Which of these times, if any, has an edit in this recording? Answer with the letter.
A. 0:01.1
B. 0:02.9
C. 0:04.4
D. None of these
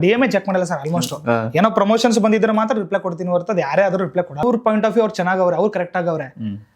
C